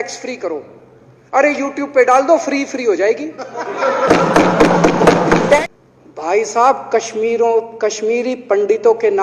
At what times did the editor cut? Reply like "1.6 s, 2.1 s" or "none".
5.6 s